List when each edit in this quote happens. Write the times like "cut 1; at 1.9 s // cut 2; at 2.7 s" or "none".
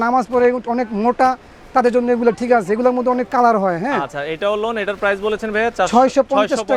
none